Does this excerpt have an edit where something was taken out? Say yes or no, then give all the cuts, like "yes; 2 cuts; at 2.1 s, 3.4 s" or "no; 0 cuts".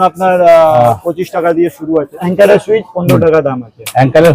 yes; 1 cut; at 2.2 s